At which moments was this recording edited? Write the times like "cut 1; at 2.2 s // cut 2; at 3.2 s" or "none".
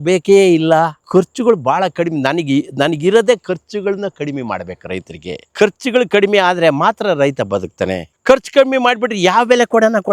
cut 1; at 1.0 s // cut 2; at 8.0 s